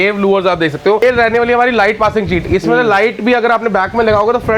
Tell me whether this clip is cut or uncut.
cut